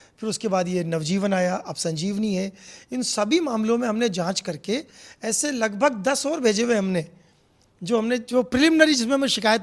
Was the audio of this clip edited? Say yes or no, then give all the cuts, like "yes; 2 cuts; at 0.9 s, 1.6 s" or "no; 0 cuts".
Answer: no; 0 cuts